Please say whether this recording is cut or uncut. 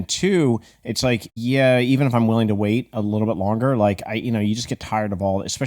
cut